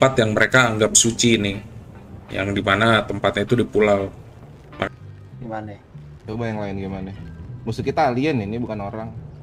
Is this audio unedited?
no; 1 cut; at 4.9 s

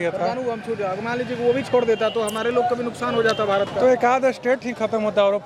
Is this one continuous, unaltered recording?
yes; 0 cuts

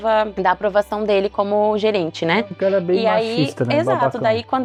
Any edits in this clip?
no; 0 cuts

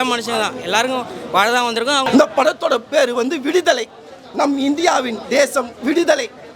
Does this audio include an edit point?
yes; 1 cut; at 2.0 s

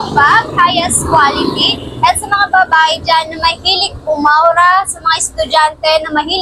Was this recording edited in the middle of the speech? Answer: no; 0 cuts

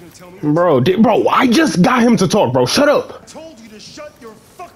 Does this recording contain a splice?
yes; 1 cut; at 3.3 s

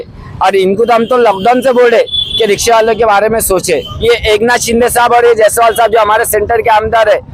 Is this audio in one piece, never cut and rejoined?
no; 1 cut; at 3.9 s

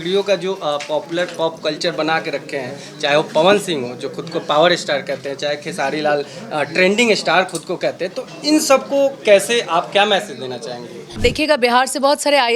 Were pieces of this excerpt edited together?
yes; 1 cut; at 11.2 s

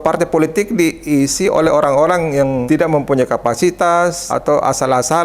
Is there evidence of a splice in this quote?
yes; 2 cuts; at 2.6 s, 4.3 s

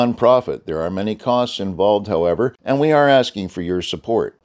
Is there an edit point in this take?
yes; 1 cut; at 2.6 s

